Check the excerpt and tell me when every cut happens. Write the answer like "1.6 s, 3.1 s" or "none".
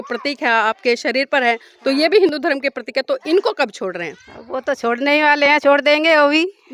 none